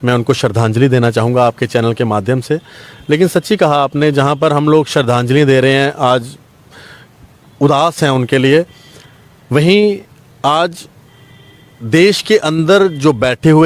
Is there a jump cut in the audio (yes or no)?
no